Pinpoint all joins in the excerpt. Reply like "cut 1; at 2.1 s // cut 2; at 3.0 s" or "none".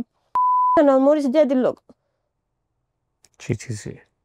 none